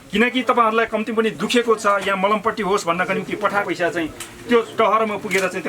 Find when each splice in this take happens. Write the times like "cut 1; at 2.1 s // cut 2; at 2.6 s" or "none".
cut 1; at 3.7 s